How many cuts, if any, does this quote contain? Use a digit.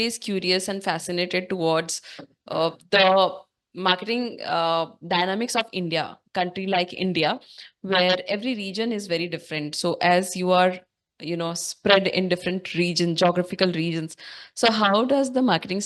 0